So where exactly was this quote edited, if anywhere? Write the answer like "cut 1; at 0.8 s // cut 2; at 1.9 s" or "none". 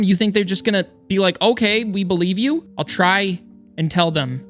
cut 1; at 2.7 s